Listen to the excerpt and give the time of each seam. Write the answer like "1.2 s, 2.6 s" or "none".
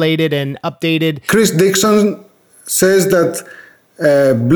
1.2 s